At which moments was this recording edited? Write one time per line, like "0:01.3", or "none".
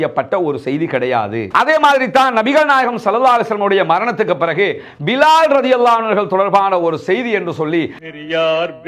0:01.5
0:08.0